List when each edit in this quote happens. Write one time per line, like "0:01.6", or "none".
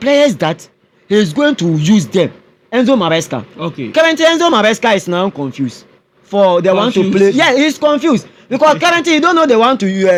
none